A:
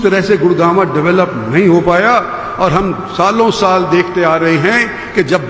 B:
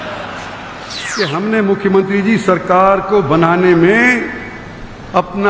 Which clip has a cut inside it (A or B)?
B